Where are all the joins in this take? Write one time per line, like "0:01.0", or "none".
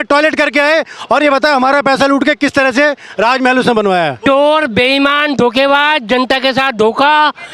0:04.2